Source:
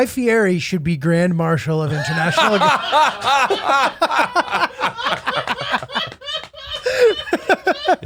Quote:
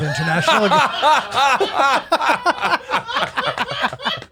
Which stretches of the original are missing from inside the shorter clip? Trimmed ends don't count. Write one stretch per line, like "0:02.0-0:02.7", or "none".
none